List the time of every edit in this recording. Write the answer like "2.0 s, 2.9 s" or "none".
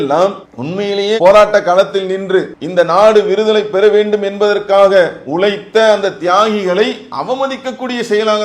2.6 s